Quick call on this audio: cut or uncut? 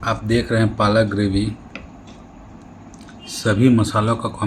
uncut